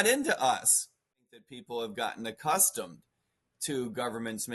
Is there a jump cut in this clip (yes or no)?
yes